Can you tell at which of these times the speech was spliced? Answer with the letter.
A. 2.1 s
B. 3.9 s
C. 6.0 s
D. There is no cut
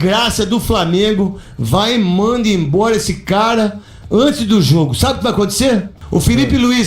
C